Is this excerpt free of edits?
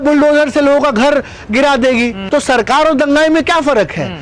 yes; 0 cuts

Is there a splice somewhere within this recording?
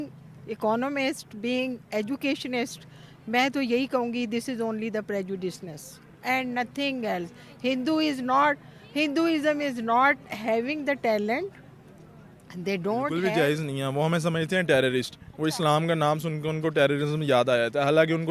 yes; 1 cut; at 13.1 s

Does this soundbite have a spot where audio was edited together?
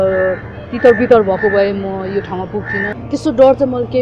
yes; 1 cut; at 2.9 s

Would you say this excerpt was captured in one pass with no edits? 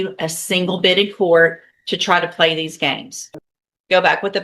no; 1 cut; at 3.1 s

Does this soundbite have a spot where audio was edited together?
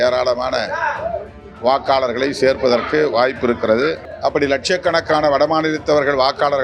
yes; 1 cut; at 4.1 s

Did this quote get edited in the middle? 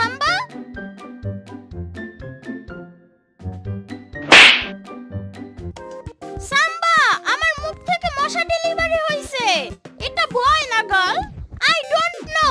yes; 1 cut; at 5.7 s

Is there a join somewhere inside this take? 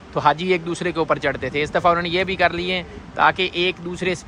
no; 0 cuts

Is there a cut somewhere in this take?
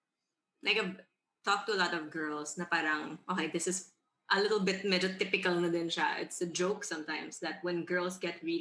no; 0 cuts

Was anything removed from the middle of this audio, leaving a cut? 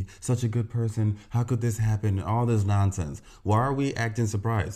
no; 0 cuts

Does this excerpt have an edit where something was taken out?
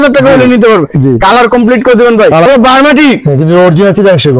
yes; 1 cut; at 2.5 s

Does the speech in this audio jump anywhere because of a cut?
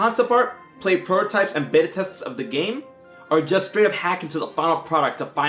yes; 1 cut; at 4.3 s

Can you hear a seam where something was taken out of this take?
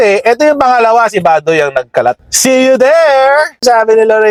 no; 0 cuts

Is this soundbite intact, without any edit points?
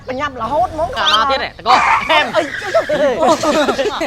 no; 1 cut; at 1.0 s

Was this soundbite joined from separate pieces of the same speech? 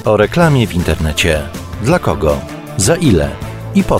no; 0 cuts

